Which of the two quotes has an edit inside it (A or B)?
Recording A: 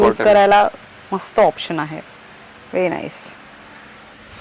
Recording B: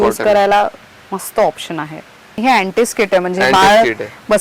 B